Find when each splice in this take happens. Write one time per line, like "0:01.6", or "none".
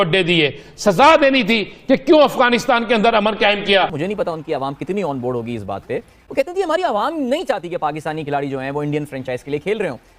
0:04.0